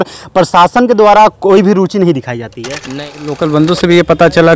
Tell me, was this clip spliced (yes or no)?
yes